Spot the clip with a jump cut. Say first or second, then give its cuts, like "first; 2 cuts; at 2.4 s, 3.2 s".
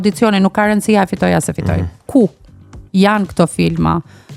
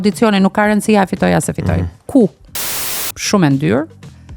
second; 1 cut; at 2.8 s